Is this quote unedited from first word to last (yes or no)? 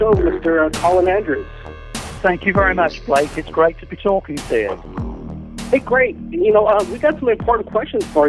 yes